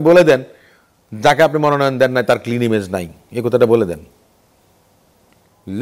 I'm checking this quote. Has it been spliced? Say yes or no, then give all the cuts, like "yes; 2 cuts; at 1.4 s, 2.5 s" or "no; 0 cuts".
no; 0 cuts